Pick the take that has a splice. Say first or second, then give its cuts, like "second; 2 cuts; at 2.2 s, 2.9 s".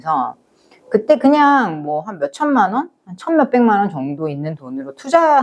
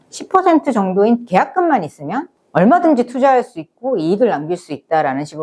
second; 1 cut; at 2.3 s